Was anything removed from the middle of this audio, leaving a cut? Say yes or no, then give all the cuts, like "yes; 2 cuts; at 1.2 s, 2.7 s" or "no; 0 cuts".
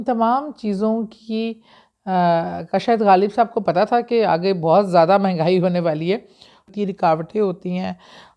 yes; 1 cut; at 6.7 s